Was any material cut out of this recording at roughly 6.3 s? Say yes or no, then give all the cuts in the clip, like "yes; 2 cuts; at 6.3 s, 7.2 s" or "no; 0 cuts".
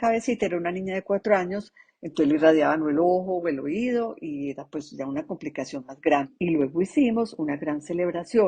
yes; 1 cut; at 6.3 s